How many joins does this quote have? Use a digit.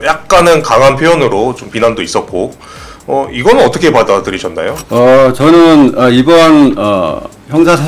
1